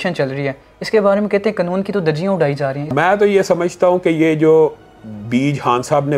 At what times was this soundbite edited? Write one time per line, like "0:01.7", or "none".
0:02.8